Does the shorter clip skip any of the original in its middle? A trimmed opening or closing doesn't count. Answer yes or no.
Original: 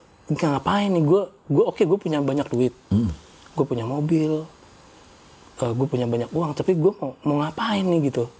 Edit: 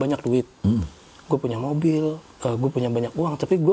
yes